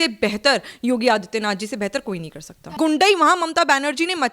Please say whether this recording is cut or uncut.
cut